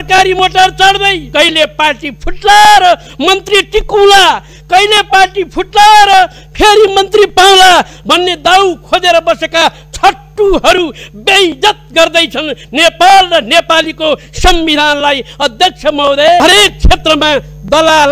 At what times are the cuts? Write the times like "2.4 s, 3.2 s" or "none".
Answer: 1.2 s, 16.4 s